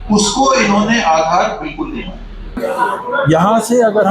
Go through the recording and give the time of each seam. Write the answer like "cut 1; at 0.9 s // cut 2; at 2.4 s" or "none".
cut 1; at 2.5 s